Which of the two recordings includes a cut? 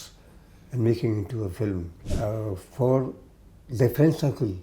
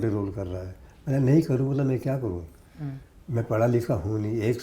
first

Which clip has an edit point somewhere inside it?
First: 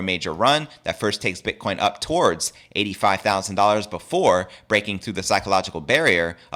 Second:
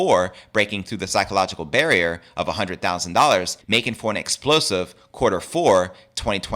second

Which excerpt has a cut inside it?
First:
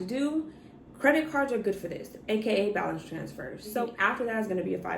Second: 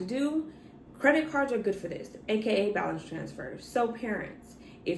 first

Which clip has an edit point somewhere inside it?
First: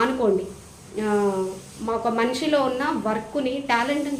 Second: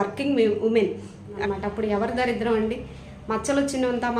second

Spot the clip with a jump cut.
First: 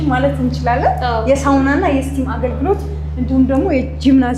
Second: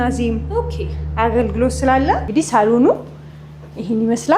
second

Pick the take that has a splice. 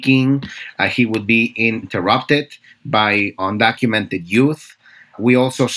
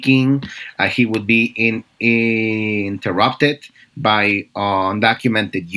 first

